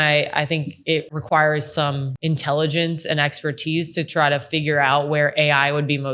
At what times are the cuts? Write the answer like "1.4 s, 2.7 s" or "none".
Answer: 1.1 s, 2.1 s